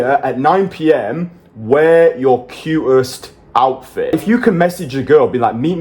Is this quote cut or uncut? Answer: cut